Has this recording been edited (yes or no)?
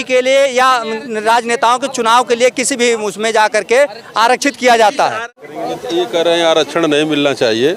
yes